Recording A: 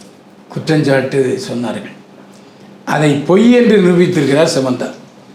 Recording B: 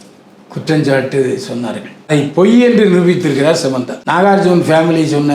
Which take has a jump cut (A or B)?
B